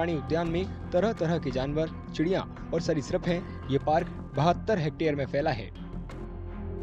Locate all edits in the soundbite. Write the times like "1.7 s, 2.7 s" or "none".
5.6 s